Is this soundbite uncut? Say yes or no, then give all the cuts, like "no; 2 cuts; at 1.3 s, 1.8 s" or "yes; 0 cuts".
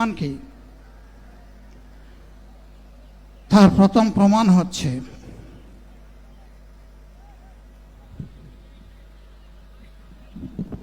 no; 1 cut; at 9.8 s